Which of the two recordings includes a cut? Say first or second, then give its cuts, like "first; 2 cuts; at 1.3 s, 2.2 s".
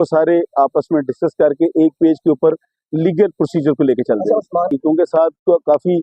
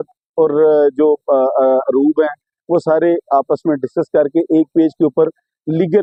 first; 1 cut; at 4.7 s